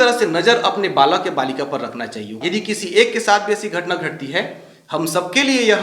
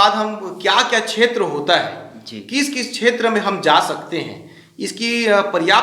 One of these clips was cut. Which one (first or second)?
first